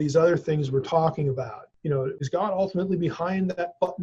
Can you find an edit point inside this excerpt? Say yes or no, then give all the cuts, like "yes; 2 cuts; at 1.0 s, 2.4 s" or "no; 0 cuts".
yes; 1 cut; at 2.0 s